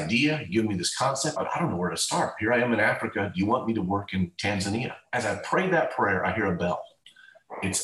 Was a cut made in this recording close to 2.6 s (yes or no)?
no